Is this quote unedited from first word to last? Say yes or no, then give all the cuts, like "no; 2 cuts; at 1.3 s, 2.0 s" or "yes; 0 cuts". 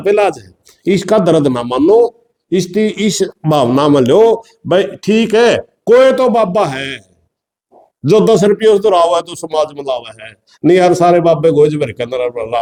yes; 0 cuts